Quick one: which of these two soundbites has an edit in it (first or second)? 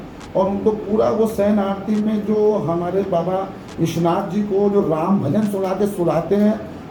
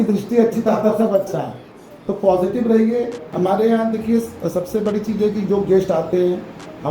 second